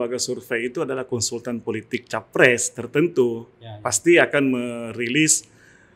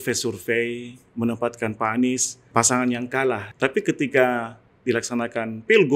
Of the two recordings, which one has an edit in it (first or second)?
second